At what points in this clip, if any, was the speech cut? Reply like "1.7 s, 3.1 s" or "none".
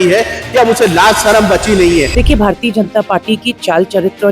2.1 s